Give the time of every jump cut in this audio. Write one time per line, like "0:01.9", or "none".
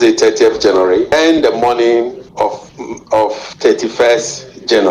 0:02.3